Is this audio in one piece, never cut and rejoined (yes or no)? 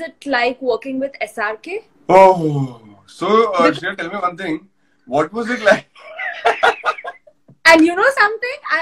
no